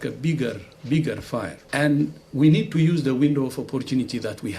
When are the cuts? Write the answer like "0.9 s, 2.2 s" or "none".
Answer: none